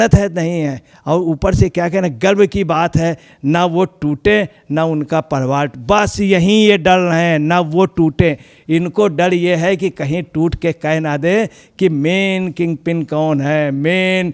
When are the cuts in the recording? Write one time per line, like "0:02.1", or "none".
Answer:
none